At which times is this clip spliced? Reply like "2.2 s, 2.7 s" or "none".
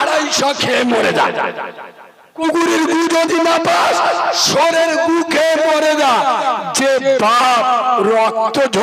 none